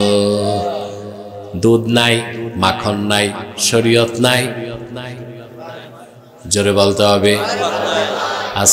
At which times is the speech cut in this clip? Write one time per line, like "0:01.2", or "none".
none